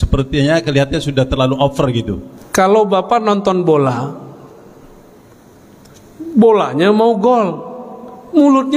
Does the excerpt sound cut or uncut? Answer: cut